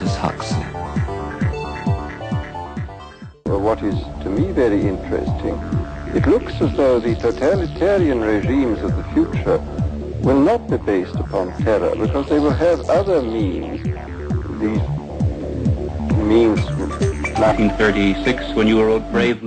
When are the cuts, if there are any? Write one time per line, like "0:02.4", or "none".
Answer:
none